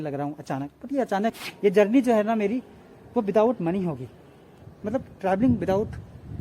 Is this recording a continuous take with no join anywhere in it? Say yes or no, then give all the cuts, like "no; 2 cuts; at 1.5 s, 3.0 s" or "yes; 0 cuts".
no; 1 cut; at 1.4 s